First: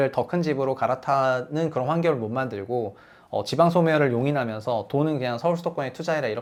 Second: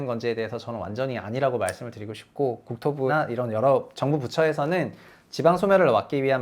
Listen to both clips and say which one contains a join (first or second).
second